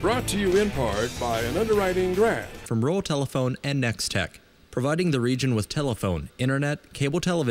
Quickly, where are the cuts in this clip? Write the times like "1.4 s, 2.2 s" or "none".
2.5 s